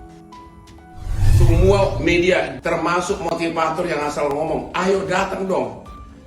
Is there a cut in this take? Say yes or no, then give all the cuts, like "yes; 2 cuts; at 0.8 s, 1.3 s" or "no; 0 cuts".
yes; 1 cut; at 1.1 s